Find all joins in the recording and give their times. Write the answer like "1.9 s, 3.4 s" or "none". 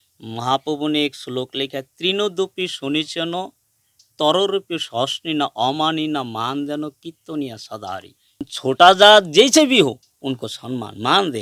8.5 s